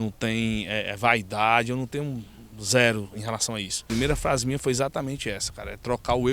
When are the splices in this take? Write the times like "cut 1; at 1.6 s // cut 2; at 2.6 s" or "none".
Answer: cut 1; at 3.7 s

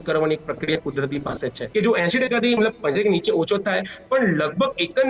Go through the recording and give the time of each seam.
cut 1; at 1.6 s

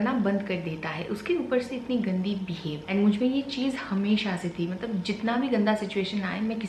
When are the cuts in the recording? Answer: none

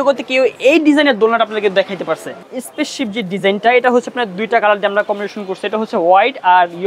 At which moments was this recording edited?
cut 1; at 2.4 s

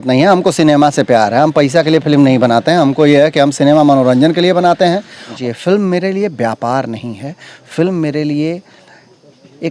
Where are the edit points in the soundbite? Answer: cut 1; at 5.3 s

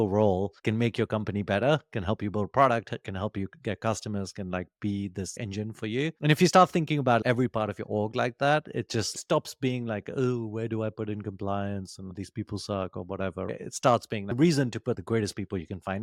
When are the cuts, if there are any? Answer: none

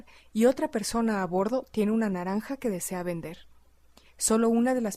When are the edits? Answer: cut 1; at 2.0 s

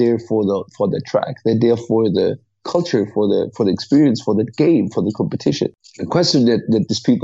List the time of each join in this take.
cut 1; at 5.9 s

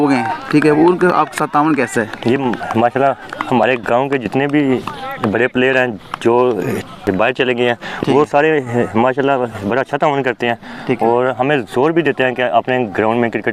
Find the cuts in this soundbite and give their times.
none

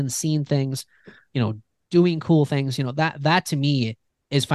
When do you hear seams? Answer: none

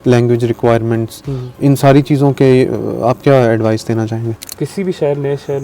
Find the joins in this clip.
cut 1; at 4.4 s

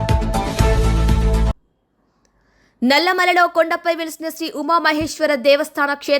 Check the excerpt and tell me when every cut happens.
cut 1; at 1.6 s

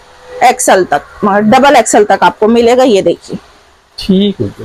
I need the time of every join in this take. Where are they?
none

